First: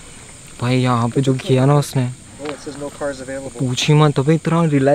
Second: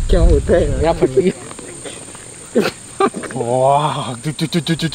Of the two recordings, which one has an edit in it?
second; 1 cut; at 1.3 s

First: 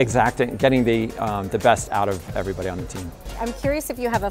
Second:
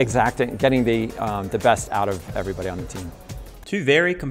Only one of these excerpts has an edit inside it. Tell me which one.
first; 1 cut; at 3.3 s

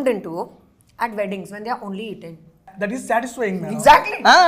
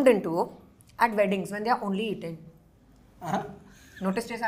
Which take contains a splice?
first; 1 cut; at 2.7 s

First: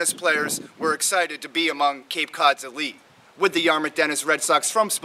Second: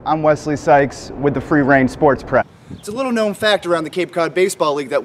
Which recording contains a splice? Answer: second; 1 cut; at 2.6 s

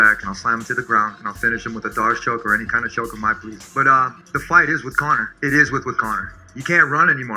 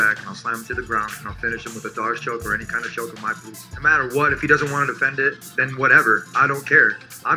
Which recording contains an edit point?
first; 2 cuts; at 3.5 s, 5.3 s

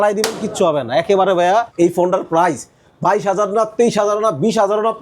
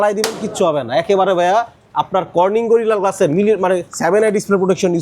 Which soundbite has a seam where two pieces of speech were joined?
first; 1 cut; at 1.7 s

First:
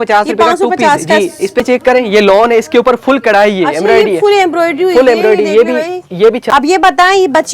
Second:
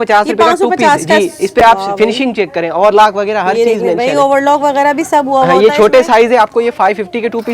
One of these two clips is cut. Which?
first; 2 cuts; at 1.6 s, 6.4 s

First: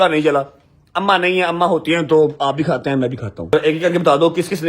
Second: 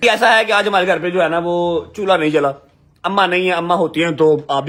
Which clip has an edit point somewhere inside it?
first; 1 cut; at 3.5 s

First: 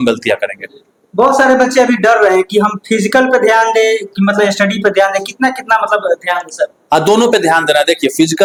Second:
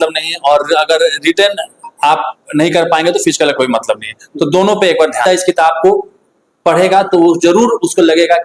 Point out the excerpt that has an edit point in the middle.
second; 1 cut; at 5.2 s

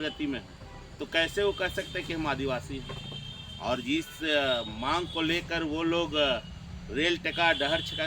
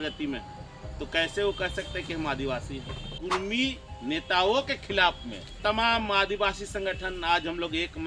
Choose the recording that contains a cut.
second; 2 cuts; at 3.2 s, 5.5 s

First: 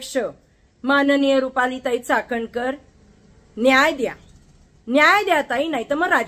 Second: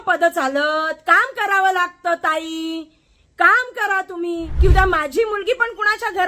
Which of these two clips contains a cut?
second; 1 cut; at 4.5 s

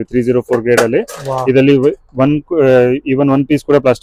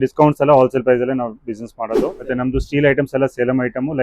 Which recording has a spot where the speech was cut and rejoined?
second; 1 cut; at 2.2 s

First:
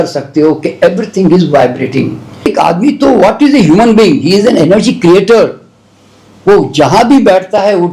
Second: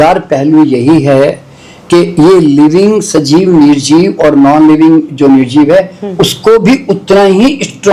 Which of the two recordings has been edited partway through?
first; 1 cut; at 2.5 s

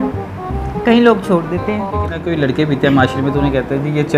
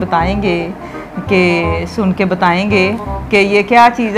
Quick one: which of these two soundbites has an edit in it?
first; 1 cut; at 2.1 s

